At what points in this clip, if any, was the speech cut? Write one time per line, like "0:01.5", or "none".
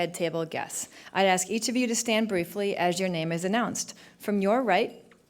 0:01.4